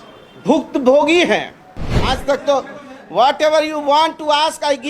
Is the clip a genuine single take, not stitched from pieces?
no; 1 cut; at 2.0 s

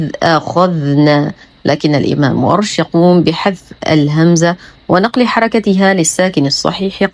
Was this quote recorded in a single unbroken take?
yes; 0 cuts

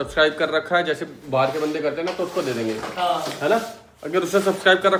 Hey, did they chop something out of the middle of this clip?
no; 0 cuts

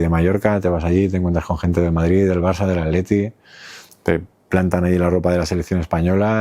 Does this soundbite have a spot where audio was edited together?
no; 0 cuts

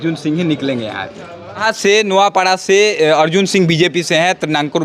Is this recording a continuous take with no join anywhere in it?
no; 1 cut; at 1.6 s

